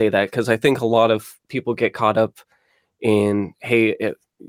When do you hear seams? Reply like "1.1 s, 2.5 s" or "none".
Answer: none